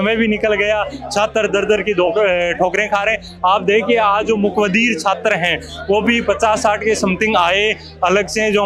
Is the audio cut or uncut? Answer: uncut